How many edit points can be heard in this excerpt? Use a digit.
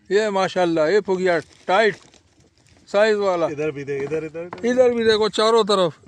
0